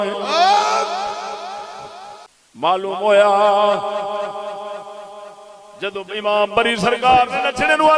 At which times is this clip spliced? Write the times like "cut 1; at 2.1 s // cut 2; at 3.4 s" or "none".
cut 1; at 2.2 s